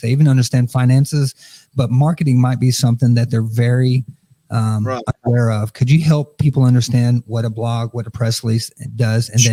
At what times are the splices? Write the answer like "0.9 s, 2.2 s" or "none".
none